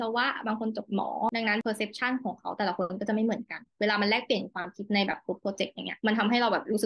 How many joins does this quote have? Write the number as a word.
one